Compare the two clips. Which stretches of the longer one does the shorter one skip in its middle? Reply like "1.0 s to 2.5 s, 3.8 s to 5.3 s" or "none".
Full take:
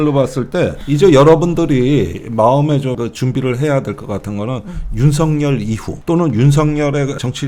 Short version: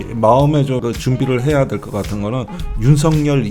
none